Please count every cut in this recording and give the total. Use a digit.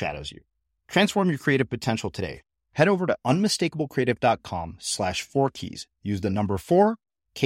0